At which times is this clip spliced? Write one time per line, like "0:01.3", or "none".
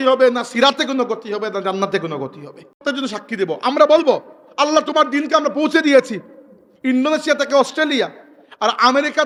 none